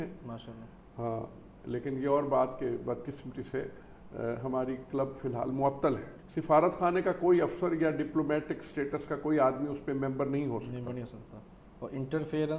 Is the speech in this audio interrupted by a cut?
yes; 1 cut; at 6.2 s

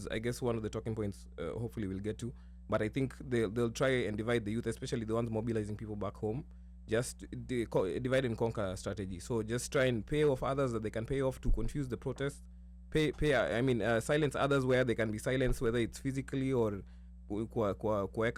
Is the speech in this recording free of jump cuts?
yes; 0 cuts

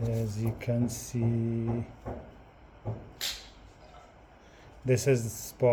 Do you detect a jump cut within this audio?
no; 0 cuts

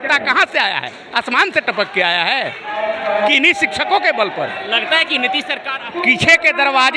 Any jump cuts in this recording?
yes; 1 cut; at 5.7 s

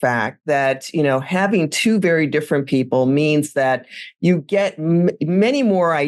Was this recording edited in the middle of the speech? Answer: no; 0 cuts

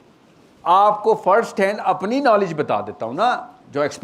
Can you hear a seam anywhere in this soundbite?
no; 0 cuts

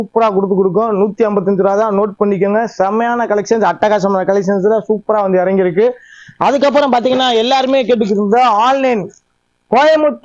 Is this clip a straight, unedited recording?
yes; 0 cuts

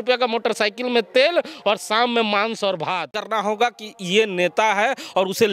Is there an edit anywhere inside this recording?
yes; 1 cut; at 3.1 s

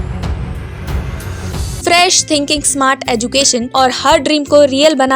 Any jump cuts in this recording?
yes; 2 cuts; at 1.7 s, 3.7 s

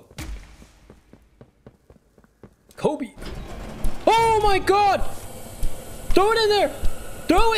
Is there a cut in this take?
no; 0 cuts

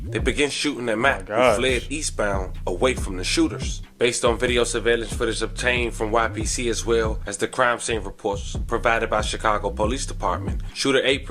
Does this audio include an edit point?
no; 0 cuts

